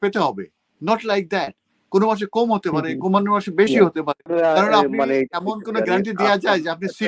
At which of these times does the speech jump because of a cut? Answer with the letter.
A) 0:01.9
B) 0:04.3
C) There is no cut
B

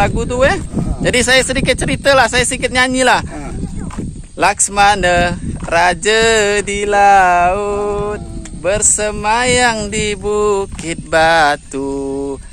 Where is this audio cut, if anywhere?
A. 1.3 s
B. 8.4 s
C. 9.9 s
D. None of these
D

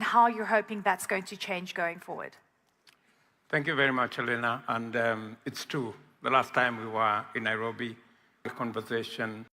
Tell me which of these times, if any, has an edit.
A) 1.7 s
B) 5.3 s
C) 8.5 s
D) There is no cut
C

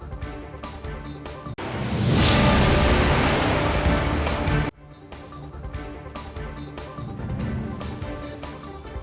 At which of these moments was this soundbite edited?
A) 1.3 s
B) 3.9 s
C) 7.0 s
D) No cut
D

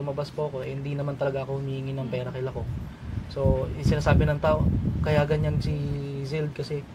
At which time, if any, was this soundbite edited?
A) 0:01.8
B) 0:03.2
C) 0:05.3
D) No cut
D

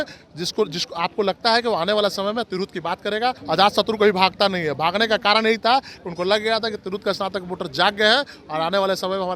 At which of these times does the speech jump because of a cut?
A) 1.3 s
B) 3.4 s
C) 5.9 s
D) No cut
B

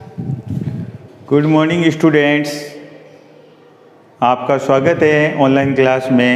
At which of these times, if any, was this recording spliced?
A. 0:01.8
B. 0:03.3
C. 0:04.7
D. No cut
A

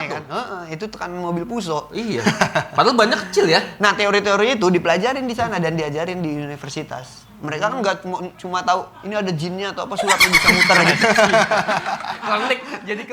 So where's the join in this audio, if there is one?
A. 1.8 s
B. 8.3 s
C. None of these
C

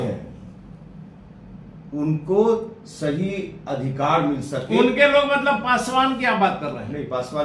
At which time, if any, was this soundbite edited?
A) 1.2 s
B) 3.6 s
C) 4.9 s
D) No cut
D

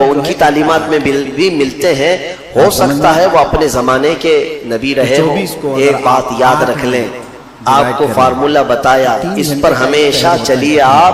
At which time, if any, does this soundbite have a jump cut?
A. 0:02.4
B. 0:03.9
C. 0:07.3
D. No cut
C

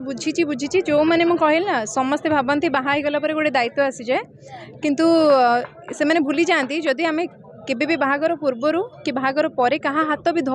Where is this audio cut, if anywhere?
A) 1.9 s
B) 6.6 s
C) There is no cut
C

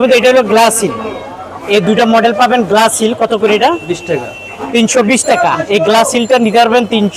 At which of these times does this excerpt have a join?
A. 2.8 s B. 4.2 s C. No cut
C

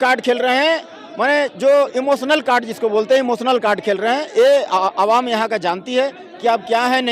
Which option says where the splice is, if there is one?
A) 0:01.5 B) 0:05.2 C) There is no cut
C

